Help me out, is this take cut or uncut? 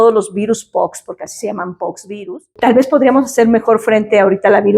cut